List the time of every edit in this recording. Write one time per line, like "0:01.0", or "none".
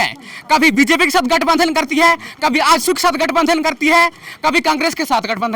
none